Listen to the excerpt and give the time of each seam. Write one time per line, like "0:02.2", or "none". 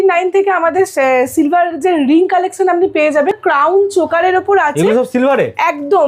0:03.4

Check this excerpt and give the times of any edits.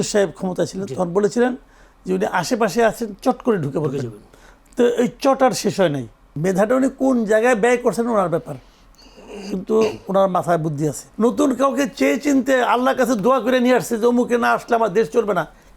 0:06.3
0:11.0

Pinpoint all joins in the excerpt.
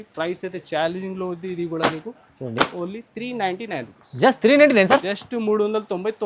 none

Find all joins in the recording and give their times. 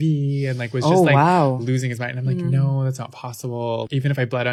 none

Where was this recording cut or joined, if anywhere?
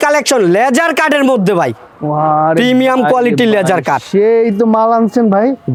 none

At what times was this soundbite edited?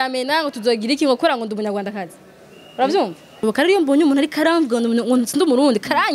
0:03.4

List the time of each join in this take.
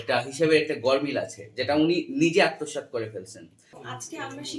none

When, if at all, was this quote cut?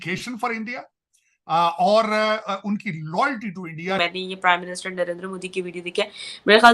0:04.0

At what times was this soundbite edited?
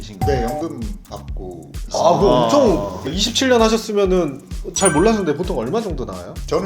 0:03.0

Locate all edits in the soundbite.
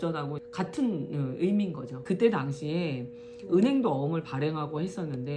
0:01.9

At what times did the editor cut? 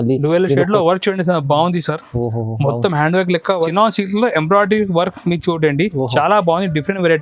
0:03.7

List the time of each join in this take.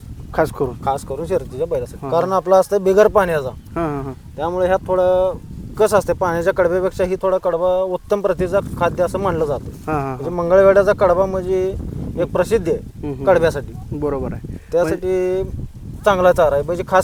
none

